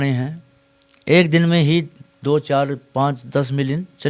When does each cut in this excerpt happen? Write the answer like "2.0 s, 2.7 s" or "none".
none